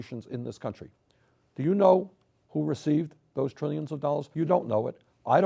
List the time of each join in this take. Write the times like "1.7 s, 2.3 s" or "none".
4.3 s